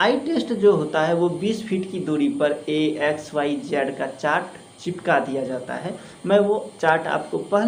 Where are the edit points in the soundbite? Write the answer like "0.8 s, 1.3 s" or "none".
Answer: none